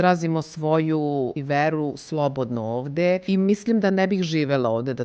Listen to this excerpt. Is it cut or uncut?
cut